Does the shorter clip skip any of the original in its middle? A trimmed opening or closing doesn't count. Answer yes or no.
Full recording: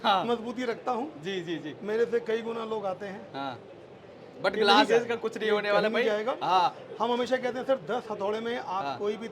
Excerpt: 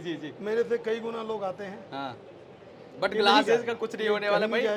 no